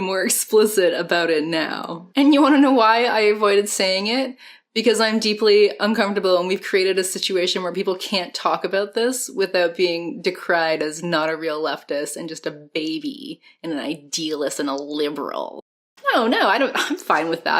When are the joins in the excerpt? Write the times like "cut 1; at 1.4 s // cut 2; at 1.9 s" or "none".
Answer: cut 1; at 15.8 s